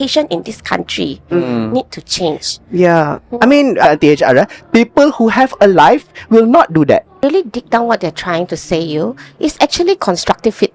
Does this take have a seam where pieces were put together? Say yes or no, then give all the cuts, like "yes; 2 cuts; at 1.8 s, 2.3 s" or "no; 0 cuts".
yes; 2 cuts; at 3.8 s, 7.2 s